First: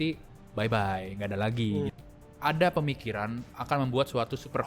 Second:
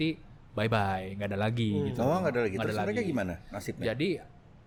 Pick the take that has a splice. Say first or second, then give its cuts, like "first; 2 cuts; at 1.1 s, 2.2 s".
first; 1 cut; at 1.9 s